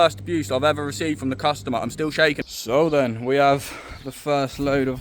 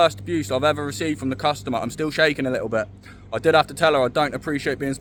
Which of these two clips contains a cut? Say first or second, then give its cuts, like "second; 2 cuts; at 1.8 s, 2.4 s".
first; 1 cut; at 2.4 s